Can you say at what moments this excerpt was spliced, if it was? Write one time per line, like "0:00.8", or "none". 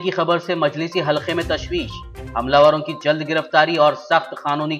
none